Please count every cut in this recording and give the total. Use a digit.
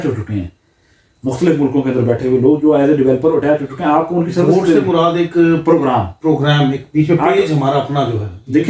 0